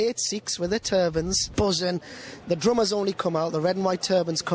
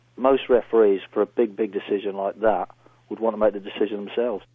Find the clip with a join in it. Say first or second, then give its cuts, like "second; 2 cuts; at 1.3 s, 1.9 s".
first; 2 cuts; at 1.4 s, 2.3 s